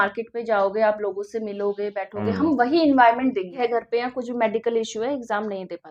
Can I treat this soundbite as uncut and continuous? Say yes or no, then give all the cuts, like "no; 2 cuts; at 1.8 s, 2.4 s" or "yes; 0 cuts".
no; 1 cut; at 3.6 s